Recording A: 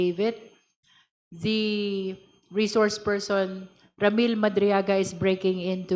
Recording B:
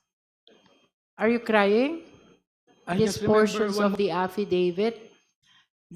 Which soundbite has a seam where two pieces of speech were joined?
B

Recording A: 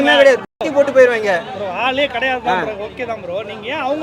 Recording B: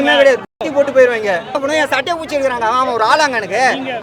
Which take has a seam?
B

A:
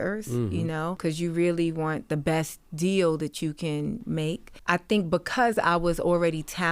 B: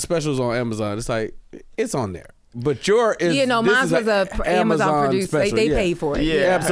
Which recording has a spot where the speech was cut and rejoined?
A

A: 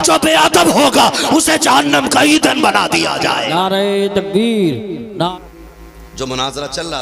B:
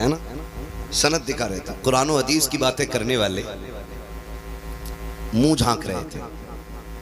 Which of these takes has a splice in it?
A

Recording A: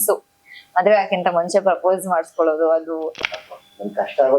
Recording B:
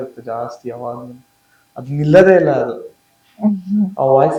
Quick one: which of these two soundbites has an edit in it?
A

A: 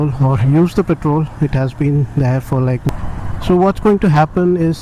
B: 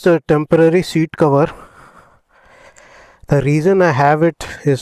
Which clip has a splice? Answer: A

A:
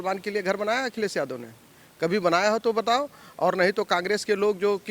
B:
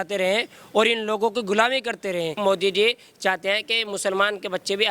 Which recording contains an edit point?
B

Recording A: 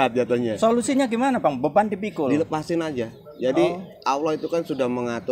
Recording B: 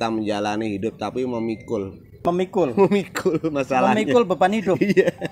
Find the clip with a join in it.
B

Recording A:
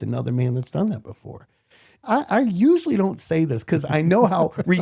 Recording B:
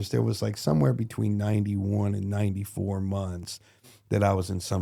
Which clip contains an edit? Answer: A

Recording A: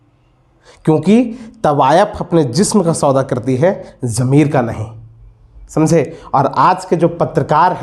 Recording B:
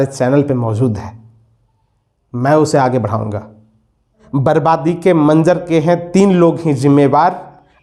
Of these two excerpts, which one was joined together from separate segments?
B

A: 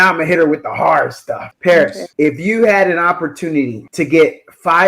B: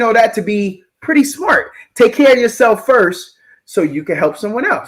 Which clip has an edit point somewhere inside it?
A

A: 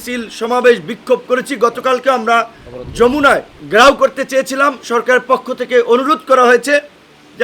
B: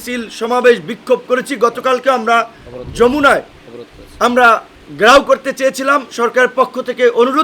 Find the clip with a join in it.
A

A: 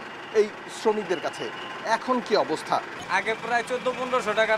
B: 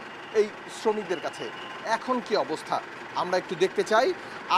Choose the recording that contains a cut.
A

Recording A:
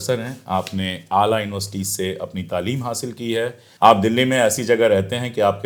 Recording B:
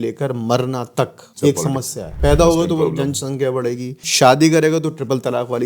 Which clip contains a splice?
B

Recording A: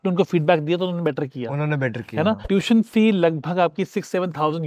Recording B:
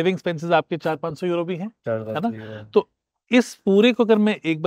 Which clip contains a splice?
A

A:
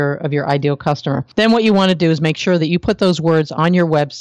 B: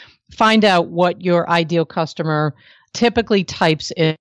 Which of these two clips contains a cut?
A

